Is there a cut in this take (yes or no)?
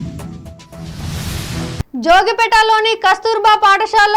yes